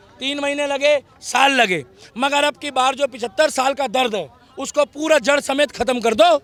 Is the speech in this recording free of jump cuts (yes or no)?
yes